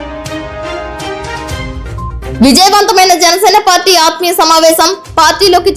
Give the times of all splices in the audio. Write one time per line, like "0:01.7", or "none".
0:02.2